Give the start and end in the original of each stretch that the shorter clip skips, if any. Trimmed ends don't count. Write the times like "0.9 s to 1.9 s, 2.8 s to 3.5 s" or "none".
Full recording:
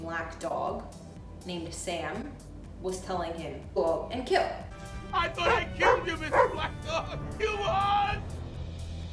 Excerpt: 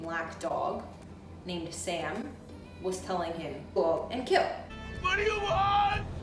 5.0 s to 7.1 s